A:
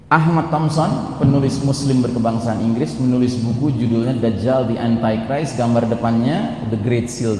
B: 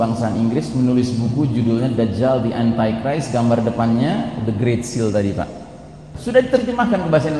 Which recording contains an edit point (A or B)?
B